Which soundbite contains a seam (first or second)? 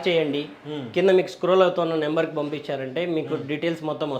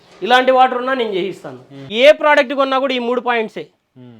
second